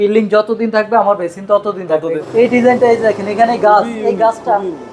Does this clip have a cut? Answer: yes; 1 cut; at 2.1 s

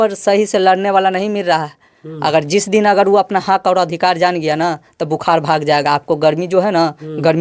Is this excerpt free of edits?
yes; 0 cuts

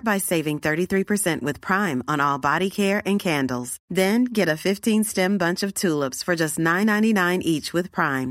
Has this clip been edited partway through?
no; 0 cuts

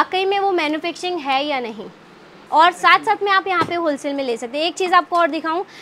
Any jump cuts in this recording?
yes; 1 cut; at 2.3 s

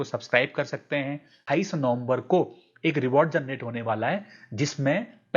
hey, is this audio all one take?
no; 1 cut; at 1.3 s

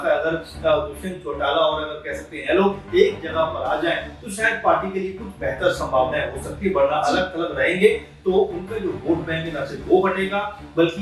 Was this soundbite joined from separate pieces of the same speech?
no; 0 cuts

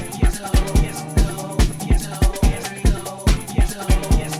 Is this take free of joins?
yes; 0 cuts

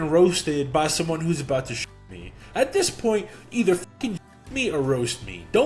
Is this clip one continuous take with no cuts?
yes; 0 cuts

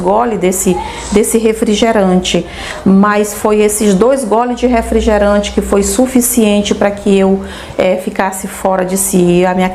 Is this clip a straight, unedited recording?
yes; 0 cuts

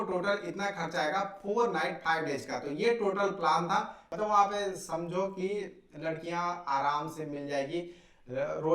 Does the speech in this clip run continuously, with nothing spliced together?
no; 1 cut; at 4.0 s

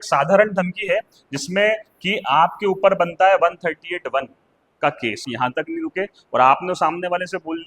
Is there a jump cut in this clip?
yes; 1 cut; at 5.3 s

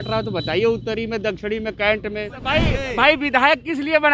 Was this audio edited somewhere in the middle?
yes; 1 cut; at 2.5 s

